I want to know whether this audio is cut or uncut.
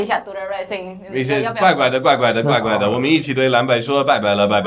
uncut